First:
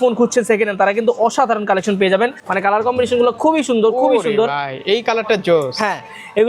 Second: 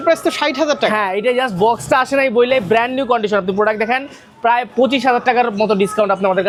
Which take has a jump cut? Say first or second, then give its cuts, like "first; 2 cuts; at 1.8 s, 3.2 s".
first; 1 cut; at 2.4 s